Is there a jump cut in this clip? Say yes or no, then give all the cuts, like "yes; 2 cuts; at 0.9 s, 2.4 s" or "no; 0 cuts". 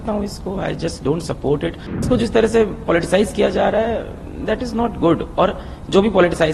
yes; 1 cut; at 2.0 s